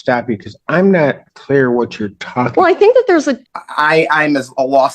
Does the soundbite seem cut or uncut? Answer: cut